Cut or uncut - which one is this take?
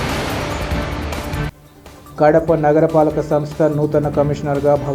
uncut